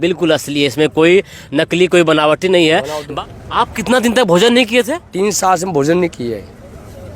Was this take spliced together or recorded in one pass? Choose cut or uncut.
cut